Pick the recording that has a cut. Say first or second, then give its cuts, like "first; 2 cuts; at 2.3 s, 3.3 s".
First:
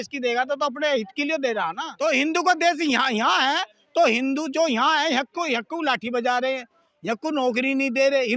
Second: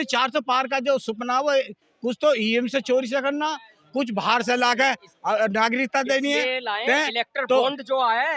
first; 1 cut; at 1.9 s